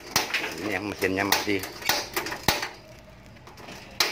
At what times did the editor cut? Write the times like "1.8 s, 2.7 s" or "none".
2.3 s